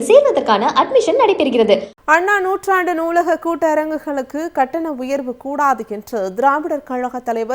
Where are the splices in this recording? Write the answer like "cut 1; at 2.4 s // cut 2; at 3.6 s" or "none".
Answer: cut 1; at 1.9 s